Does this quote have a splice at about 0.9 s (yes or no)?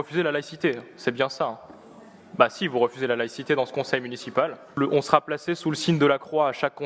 no